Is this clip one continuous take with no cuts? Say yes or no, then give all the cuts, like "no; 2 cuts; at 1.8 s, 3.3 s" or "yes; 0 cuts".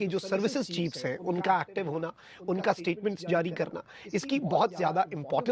yes; 0 cuts